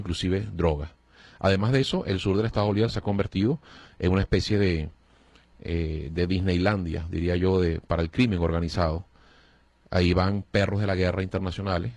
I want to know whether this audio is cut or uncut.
cut